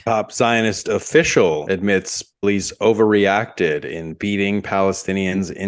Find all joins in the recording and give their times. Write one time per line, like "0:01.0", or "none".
none